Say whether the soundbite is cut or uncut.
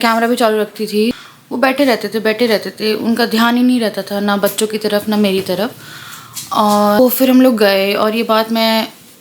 cut